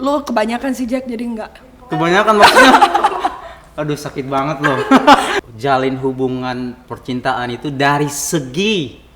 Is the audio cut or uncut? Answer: cut